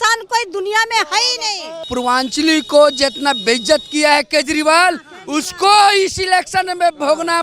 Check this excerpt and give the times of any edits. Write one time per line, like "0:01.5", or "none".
0:01.8